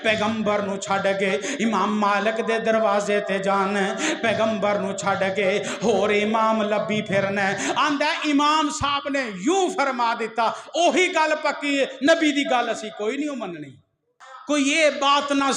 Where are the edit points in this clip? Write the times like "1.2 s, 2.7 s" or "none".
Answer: 14.3 s